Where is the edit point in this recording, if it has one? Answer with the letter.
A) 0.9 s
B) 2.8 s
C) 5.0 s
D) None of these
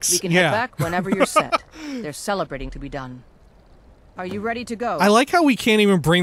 C